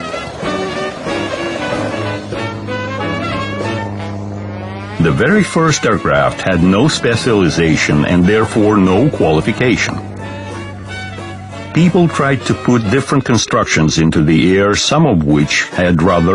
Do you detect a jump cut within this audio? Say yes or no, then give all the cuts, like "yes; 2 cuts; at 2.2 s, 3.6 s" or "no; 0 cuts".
yes; 1 cut; at 3.3 s